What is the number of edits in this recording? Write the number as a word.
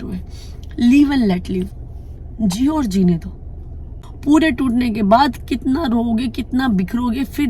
one